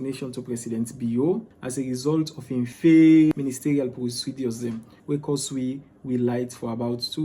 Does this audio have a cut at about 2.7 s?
yes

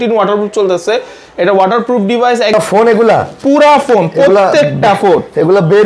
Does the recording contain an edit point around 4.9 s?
no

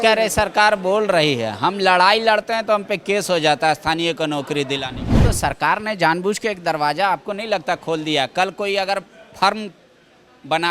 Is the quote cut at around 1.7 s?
no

